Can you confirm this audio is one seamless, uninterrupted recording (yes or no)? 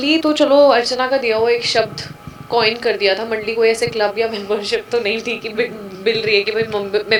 yes